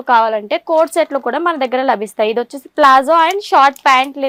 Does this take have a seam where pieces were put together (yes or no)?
no